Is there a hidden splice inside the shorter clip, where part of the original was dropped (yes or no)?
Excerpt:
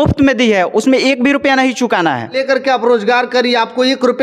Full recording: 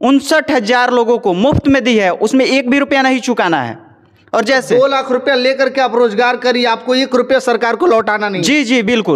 yes